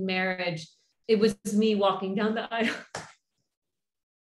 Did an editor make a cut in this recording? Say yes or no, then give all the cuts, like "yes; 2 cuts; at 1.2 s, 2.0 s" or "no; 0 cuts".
no; 0 cuts